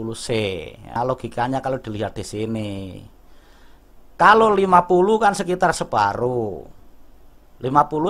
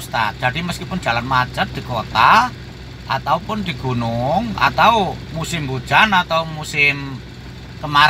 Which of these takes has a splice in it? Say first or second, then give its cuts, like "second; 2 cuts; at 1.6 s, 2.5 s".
first; 1 cut; at 1.0 s